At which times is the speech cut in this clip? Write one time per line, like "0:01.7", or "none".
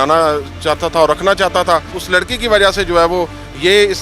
0:02.0